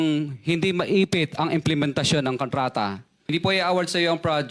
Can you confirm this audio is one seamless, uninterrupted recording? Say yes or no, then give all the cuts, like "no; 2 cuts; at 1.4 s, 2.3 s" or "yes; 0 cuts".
no; 1 cut; at 3.1 s